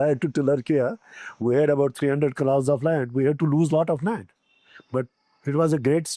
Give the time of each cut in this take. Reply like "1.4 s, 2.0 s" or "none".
none

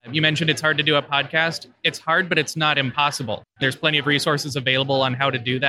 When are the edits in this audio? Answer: 3.6 s

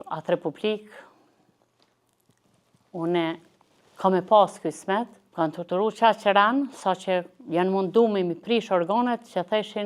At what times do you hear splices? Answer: 5.2 s

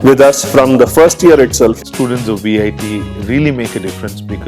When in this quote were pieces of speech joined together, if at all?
1.8 s

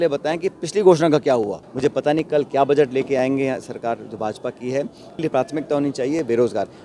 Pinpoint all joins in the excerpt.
1.6 s, 5.2 s

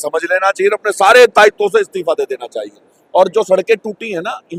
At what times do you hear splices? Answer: none

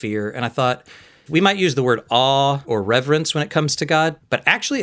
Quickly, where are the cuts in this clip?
1.3 s

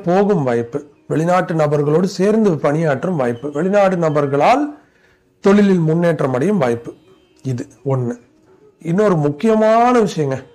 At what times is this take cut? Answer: 8.3 s

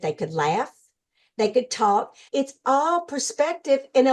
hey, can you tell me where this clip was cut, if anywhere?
2.2 s

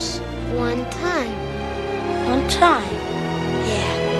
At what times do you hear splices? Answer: none

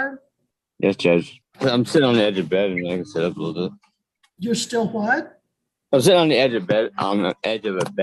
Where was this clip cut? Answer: 1.4 s

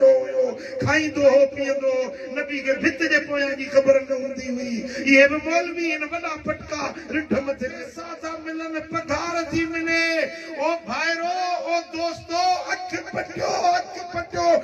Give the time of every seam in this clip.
8.0 s

